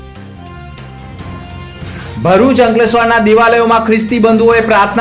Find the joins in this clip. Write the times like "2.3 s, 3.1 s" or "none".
1.0 s